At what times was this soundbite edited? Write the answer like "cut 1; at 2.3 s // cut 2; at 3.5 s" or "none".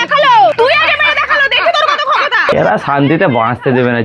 cut 1; at 2.5 s